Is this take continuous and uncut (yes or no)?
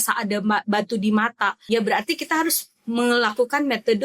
no